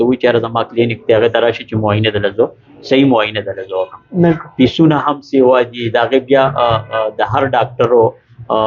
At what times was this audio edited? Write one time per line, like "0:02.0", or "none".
none